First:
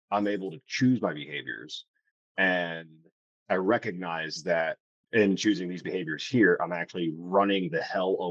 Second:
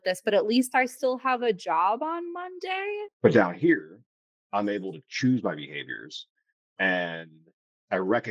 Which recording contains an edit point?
second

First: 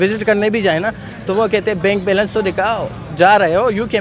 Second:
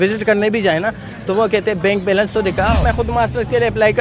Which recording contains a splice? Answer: second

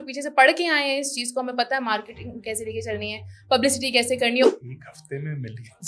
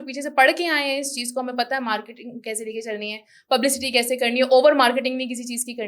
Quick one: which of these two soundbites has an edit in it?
first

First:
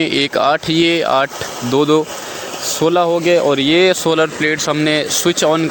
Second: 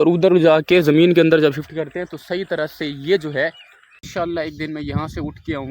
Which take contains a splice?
second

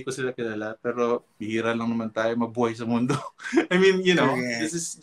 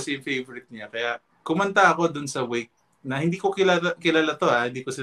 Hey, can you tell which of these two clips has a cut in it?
first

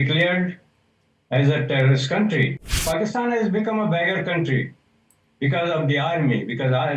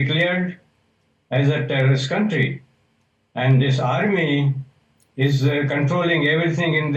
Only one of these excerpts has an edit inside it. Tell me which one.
first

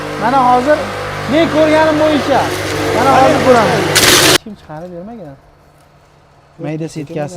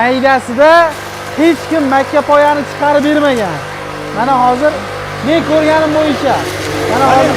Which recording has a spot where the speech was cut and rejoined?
first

